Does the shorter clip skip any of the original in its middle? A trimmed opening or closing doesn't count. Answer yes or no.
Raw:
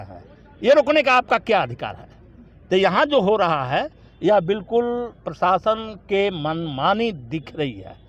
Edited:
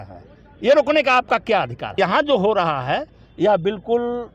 yes